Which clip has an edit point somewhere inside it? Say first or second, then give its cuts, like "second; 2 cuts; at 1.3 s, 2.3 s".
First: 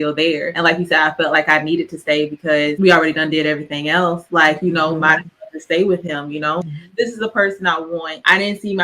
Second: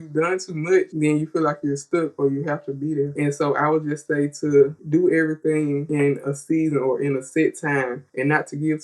first; 1 cut; at 6.6 s